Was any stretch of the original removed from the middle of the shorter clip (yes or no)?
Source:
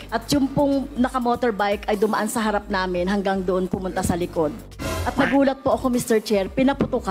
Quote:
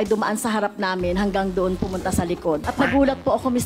yes